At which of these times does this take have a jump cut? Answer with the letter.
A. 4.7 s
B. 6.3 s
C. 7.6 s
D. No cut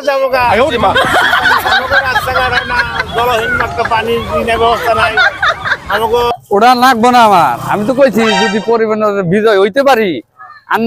B